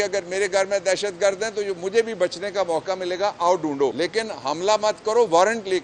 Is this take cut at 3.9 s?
yes; 1 cut; at 3.9 s

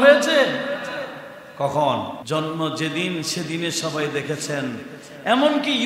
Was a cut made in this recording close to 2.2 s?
yes; 1 cut; at 2.2 s

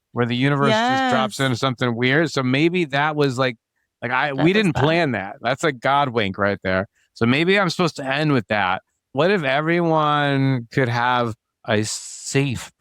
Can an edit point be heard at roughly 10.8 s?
no; 1 cut; at 9.1 s

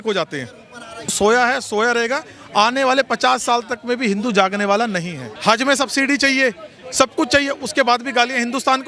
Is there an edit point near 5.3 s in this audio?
yes; 2 cuts; at 1.1 s, 5.3 s

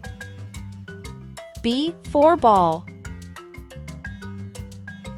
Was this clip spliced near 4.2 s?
no; 0 cuts

